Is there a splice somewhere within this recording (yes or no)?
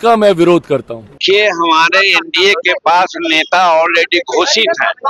yes